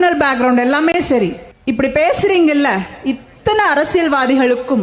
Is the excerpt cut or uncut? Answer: cut